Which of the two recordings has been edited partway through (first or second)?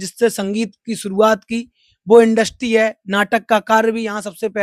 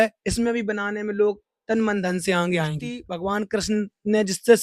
second